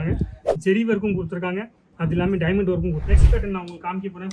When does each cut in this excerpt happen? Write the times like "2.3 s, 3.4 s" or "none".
3.0 s